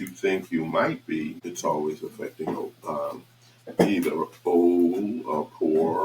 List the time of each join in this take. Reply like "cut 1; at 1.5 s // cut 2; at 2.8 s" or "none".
cut 1; at 1.4 s